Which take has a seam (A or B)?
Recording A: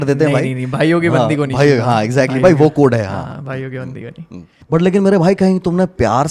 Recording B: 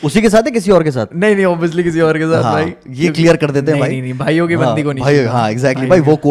A